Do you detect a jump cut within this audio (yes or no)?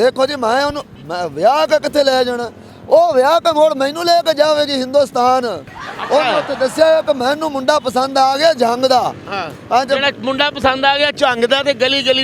no